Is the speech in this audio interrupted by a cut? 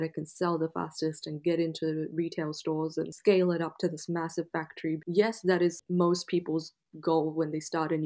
yes; 3 cuts; at 3.1 s, 5.0 s, 5.8 s

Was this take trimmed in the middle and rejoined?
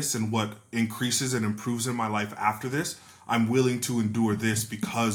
no; 0 cuts

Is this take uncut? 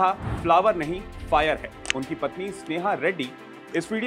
no; 1 cut; at 1.7 s

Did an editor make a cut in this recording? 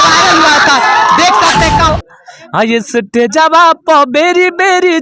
yes; 1 cut; at 1.9 s

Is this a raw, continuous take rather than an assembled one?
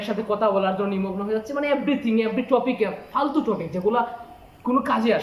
yes; 0 cuts

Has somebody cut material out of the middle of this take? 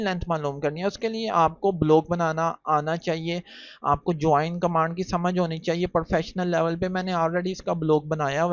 no; 0 cuts

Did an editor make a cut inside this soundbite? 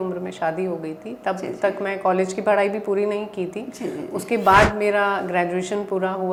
no; 0 cuts

